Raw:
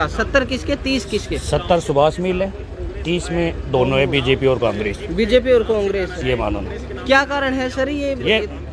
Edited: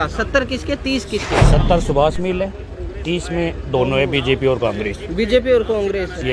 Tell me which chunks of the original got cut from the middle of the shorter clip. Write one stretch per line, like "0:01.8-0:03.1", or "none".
none